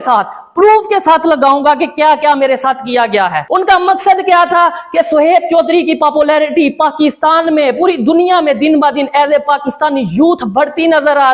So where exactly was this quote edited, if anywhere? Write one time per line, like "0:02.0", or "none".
0:03.4

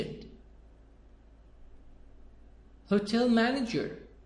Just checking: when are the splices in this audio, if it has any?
0:03.1

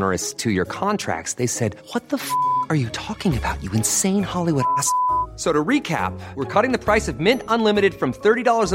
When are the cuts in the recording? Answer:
none

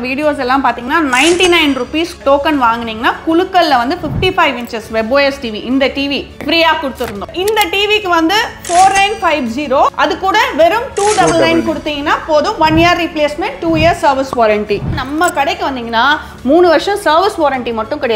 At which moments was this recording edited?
0:06.4
0:07.2
0:09.9
0:15.0

